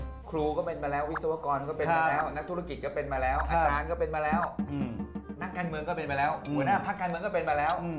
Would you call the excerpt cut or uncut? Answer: uncut